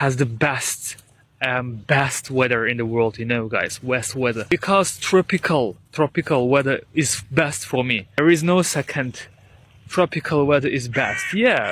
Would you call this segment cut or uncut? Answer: uncut